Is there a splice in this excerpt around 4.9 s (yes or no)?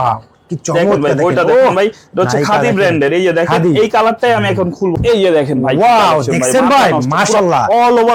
yes